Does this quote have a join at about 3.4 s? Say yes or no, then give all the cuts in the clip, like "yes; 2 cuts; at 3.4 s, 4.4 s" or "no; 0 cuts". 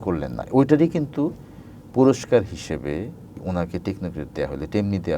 yes; 1 cut; at 3.4 s